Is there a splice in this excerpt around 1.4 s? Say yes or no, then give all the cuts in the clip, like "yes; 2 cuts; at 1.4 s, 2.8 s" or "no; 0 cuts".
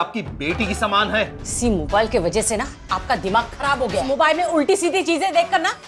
yes; 2 cuts; at 1.4 s, 4.0 s